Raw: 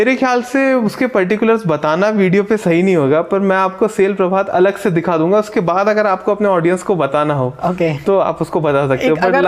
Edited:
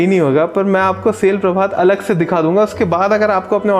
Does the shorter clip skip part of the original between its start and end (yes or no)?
no